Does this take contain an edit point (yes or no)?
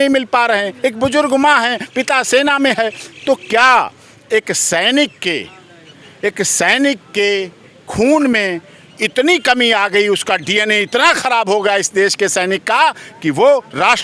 no